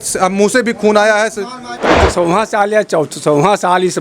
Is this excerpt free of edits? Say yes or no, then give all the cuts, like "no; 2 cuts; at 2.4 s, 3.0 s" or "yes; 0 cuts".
no; 1 cut; at 1.6 s